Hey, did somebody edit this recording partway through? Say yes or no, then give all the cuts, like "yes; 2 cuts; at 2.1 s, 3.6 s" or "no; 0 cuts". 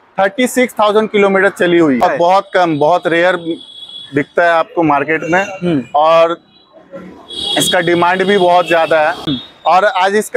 yes; 2 cuts; at 2.0 s, 9.4 s